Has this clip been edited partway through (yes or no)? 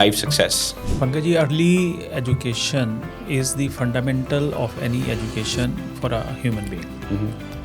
no